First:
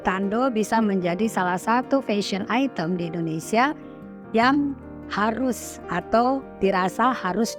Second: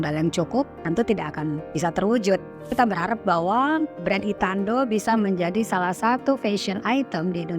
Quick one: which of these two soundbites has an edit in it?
second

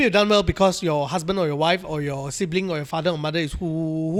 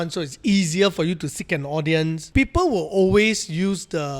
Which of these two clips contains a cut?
second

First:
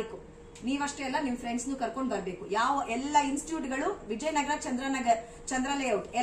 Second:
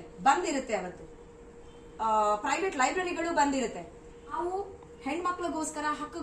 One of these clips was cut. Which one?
second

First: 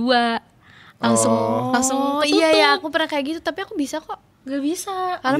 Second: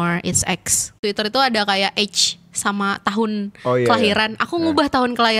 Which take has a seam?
second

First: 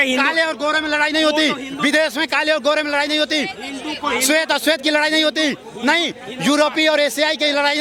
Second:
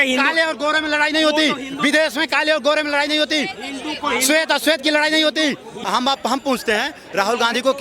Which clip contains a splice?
second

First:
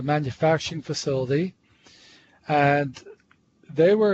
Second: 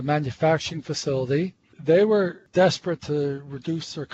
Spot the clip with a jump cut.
second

